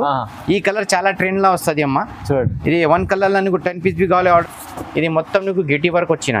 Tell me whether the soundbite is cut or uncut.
cut